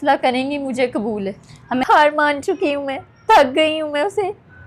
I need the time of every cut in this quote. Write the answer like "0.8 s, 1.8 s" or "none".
1.8 s